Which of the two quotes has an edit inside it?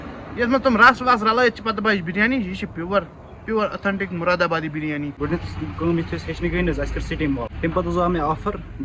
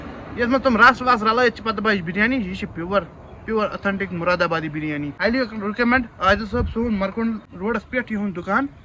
first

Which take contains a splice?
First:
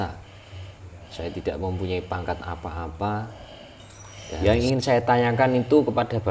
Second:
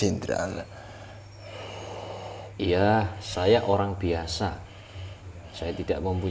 first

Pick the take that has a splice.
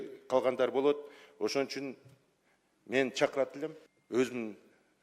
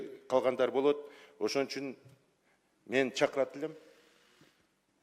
first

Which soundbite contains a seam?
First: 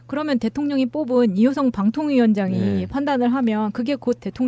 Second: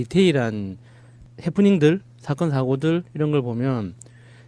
second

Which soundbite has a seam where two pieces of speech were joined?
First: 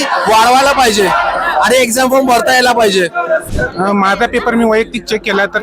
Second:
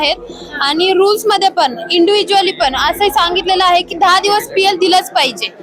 first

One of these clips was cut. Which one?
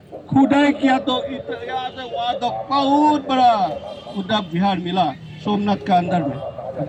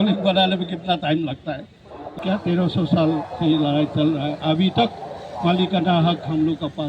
second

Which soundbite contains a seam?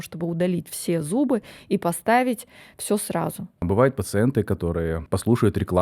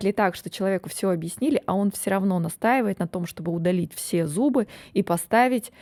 first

